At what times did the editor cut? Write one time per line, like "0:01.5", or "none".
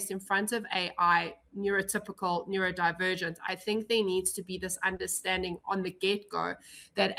none